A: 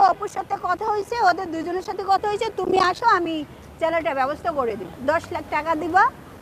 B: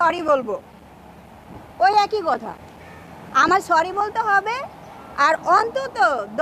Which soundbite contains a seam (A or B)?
A